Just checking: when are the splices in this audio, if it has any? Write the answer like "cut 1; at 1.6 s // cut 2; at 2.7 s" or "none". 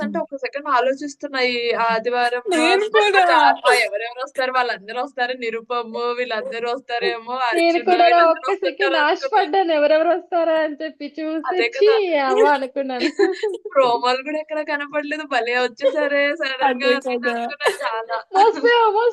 none

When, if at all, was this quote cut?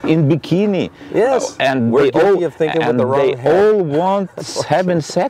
none

